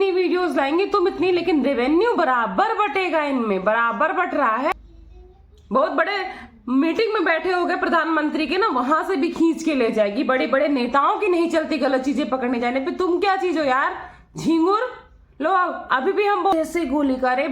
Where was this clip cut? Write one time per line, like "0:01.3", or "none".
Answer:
0:04.7
0:16.5